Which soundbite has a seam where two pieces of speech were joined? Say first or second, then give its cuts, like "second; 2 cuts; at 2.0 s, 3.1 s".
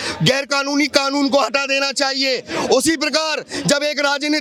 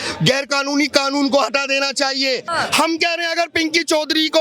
second; 1 cut; at 2.5 s